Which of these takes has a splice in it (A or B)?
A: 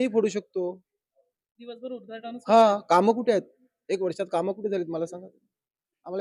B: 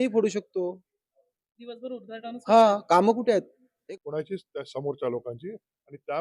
B